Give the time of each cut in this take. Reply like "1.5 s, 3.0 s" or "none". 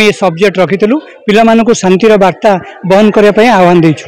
none

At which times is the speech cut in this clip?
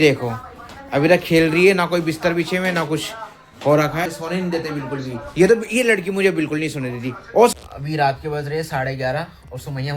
4.1 s, 7.5 s

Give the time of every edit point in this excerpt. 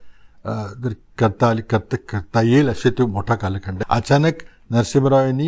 3.7 s

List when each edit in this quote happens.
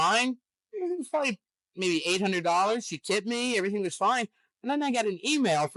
none

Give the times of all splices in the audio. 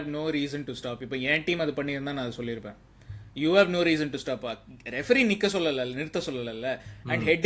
none

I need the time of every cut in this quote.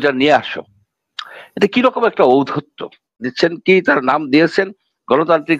3.3 s

